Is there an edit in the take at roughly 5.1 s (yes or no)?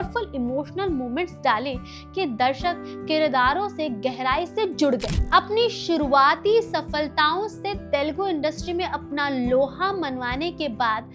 yes